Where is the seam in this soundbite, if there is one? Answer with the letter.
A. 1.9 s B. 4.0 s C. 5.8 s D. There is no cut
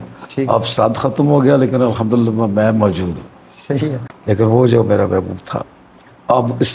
B